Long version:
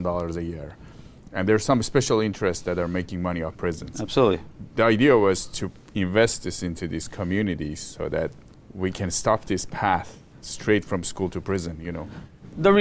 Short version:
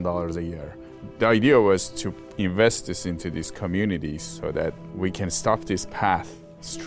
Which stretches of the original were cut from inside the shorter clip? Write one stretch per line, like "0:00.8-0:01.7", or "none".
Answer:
0:01.0-0:04.6
0:08.4-0:08.7